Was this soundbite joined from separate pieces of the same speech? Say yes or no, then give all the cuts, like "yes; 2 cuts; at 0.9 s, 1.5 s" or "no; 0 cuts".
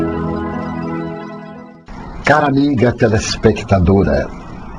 no; 0 cuts